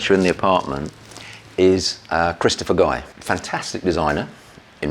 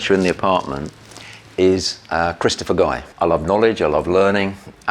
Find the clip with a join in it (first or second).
second